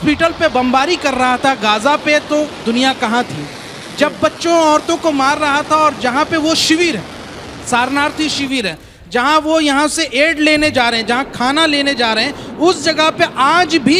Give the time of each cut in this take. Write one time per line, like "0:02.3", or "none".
none

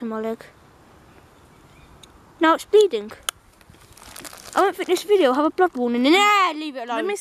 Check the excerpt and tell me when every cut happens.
none

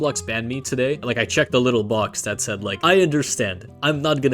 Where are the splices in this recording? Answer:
0:01.0

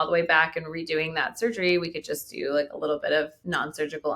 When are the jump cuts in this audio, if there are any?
none

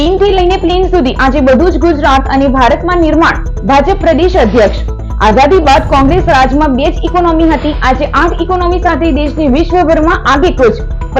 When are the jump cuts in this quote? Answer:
none

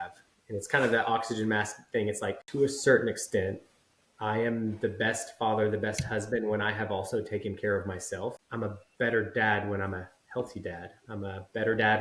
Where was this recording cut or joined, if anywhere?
0:02.4
0:08.4

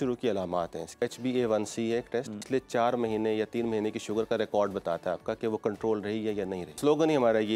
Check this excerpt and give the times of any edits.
0:01.0
0:02.4
0:06.7

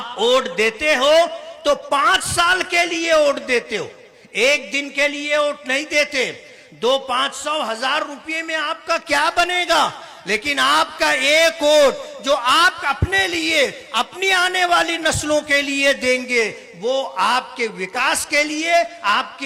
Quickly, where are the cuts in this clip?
none

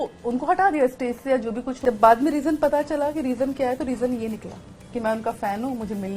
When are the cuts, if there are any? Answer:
0:01.7

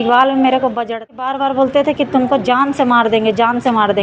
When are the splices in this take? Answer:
0:01.4

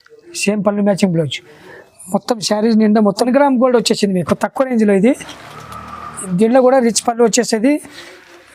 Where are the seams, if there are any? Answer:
0:03.3

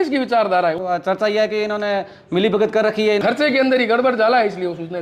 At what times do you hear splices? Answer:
0:00.8
0:03.2

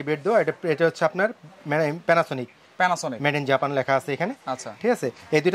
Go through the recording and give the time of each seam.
none

